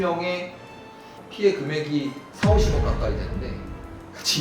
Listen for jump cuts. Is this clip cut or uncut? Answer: uncut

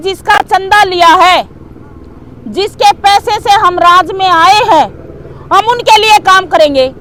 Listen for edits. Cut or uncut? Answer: uncut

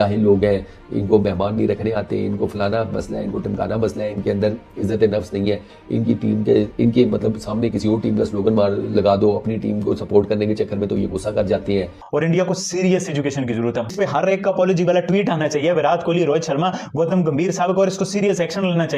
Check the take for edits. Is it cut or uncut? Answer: cut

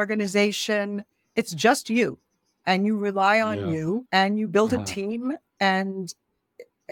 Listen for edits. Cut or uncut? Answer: cut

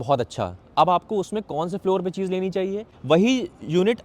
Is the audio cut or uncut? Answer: cut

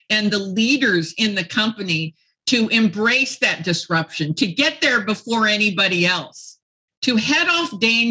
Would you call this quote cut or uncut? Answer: uncut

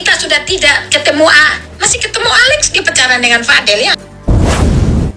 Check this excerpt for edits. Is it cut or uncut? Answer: cut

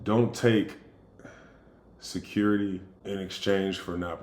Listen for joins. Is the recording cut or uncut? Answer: cut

